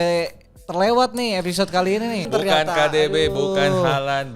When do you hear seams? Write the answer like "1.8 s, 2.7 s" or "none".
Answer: 2.3 s